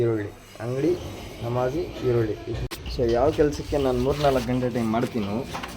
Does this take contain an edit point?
yes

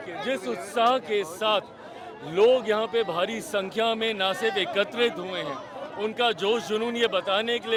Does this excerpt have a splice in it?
no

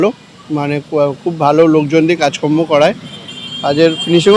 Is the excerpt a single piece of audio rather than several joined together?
yes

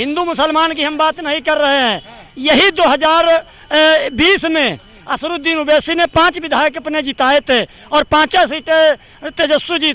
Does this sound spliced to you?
no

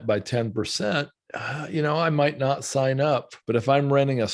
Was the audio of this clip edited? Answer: yes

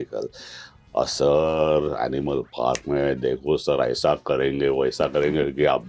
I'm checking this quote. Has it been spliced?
no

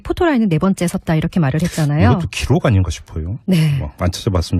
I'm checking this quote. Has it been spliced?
no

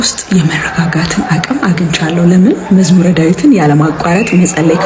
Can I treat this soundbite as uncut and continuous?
yes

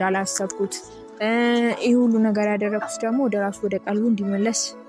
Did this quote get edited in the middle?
no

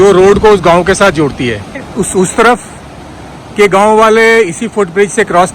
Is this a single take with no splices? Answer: no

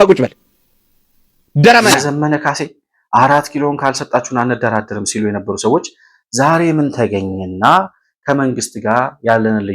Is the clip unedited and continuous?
no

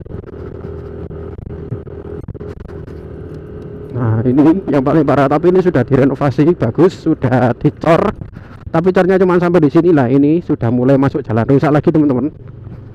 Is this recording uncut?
yes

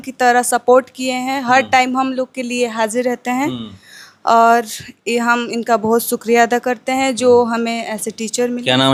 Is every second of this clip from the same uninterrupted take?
yes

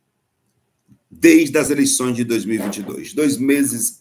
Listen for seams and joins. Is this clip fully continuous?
yes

